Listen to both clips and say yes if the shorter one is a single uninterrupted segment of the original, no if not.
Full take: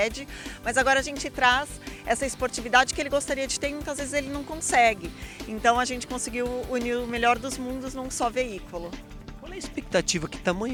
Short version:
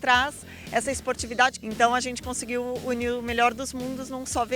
no